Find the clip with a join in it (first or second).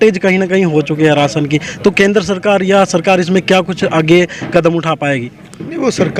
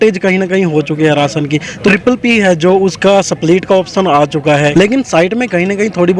second